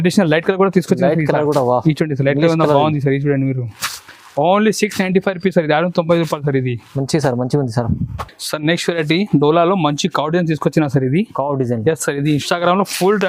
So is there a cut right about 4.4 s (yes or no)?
no